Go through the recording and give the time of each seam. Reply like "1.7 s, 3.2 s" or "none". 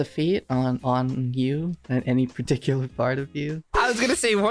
0.8 s, 1.8 s, 3.7 s